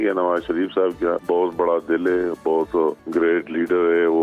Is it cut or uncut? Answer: cut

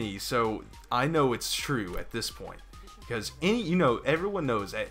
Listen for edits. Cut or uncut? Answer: cut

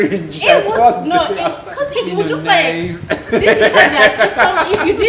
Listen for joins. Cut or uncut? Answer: cut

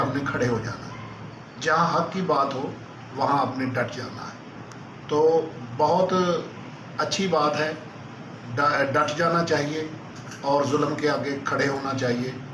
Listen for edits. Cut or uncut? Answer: uncut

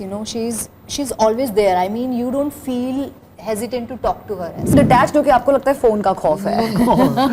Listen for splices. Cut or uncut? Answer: cut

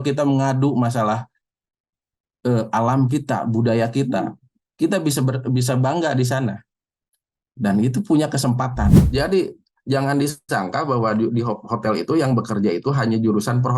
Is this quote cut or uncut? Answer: cut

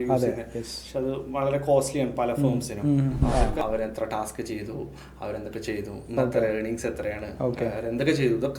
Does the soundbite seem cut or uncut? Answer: cut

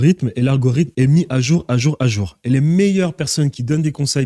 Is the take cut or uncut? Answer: cut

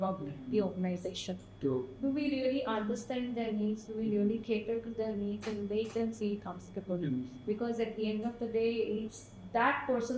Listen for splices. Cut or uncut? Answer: uncut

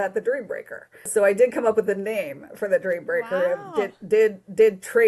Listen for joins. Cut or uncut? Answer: cut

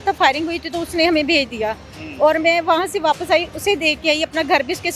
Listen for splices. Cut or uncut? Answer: uncut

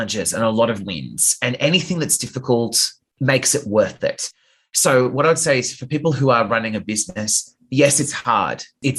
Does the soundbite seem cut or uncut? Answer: uncut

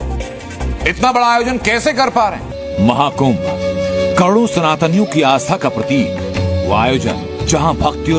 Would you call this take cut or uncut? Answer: uncut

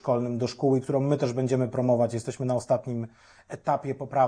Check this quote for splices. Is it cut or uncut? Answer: uncut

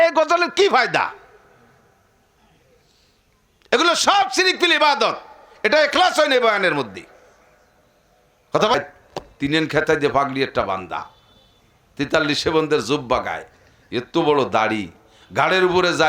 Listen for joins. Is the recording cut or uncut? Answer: cut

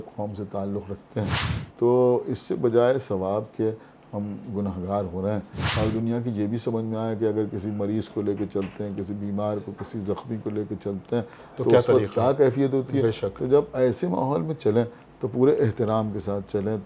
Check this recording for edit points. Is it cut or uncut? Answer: cut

